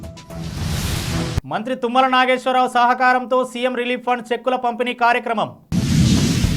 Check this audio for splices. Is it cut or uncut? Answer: uncut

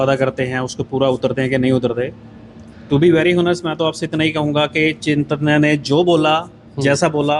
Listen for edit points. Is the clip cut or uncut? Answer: uncut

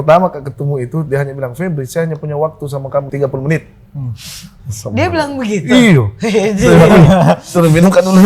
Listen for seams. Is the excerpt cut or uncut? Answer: cut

